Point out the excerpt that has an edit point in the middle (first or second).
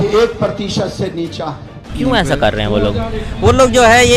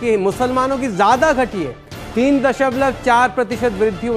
first